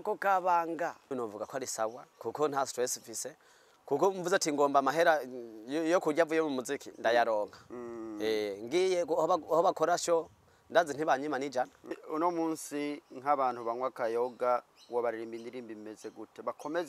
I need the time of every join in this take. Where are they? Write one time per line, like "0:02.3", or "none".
0:01.1
0:12.0